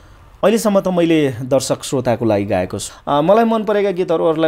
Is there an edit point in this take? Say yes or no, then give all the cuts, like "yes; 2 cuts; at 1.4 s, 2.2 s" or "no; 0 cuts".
yes; 1 cut; at 2.8 s